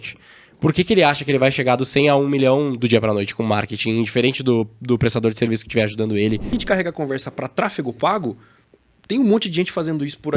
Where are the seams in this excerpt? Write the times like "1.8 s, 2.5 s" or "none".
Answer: 6.5 s